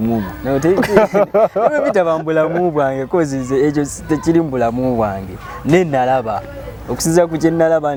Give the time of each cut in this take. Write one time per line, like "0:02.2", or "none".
none